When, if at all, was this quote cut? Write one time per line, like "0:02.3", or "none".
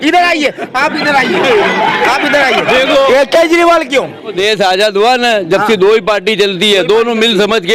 0:04.3